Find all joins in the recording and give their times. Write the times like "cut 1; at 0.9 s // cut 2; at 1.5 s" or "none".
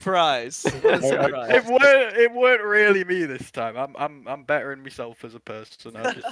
none